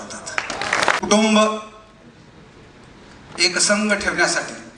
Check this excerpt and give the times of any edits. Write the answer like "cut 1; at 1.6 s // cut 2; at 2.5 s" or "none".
cut 1; at 1.0 s